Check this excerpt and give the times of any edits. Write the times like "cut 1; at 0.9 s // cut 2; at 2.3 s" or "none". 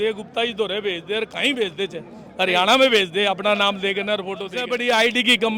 cut 1; at 4.6 s